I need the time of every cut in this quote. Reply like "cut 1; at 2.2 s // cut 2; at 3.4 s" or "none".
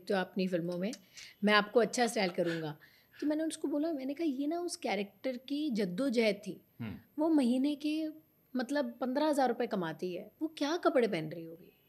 none